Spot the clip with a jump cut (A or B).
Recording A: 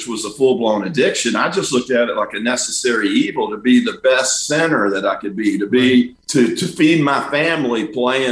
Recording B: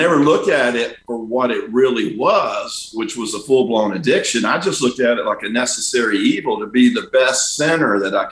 A